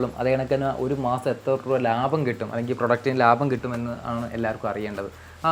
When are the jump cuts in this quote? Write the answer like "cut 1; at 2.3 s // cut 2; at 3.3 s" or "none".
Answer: none

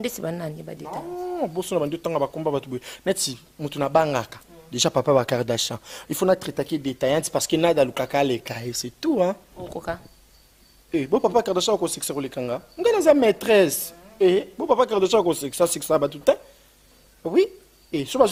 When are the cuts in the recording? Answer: none

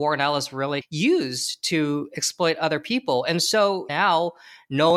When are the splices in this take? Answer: cut 1; at 0.8 s // cut 2; at 3.8 s

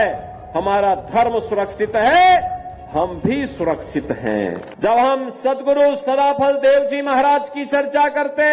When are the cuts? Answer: cut 1; at 4.8 s

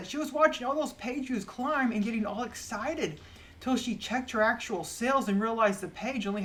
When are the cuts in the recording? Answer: none

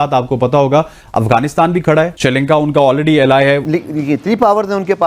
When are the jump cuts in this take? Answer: cut 1; at 2.1 s // cut 2; at 3.6 s

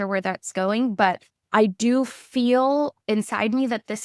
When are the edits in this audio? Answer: none

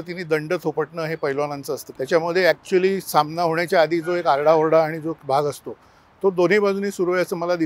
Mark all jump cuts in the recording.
cut 1; at 1.9 s

